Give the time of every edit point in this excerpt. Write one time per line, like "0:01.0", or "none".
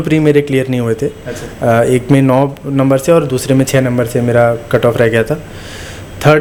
none